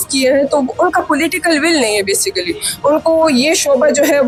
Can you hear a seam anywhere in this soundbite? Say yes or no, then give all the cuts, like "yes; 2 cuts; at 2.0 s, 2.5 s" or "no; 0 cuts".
no; 0 cuts